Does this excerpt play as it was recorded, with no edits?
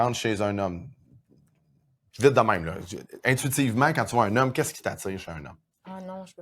yes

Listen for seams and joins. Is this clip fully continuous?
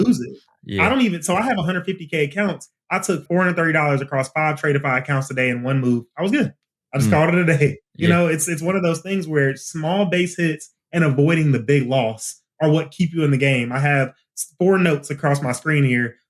no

